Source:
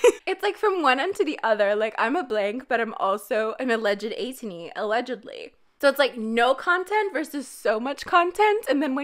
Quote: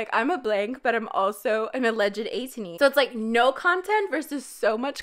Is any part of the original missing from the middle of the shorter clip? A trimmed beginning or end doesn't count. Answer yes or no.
yes